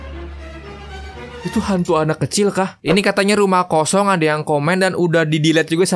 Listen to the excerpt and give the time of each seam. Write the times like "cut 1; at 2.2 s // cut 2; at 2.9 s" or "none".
none